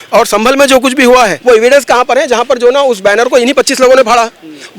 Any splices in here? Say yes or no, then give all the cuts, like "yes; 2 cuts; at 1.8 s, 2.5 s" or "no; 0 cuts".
yes; 1 cut; at 1.4 s